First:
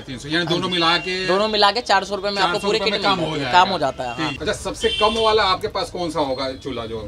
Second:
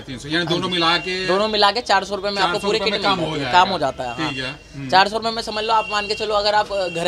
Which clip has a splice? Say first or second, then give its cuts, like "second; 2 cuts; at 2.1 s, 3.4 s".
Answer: first; 1 cut; at 4.3 s